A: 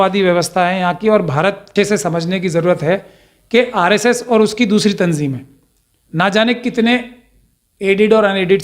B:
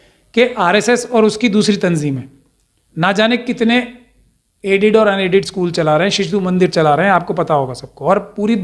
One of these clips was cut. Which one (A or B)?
A